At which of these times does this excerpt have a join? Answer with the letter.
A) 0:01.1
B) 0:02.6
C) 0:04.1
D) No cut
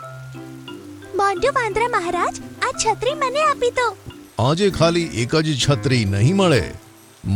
C